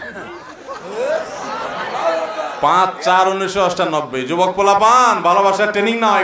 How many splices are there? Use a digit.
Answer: 0